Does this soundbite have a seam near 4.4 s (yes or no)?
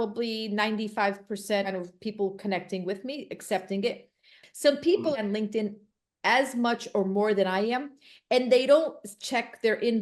yes